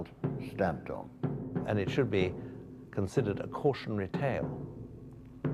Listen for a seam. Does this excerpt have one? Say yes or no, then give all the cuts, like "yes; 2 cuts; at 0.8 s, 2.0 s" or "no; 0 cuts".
yes; 1 cut; at 1.6 s